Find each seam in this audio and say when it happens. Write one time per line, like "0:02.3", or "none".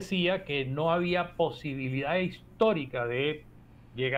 none